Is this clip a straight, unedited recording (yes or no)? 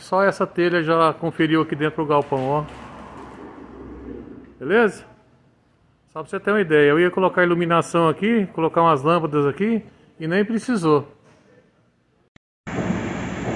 no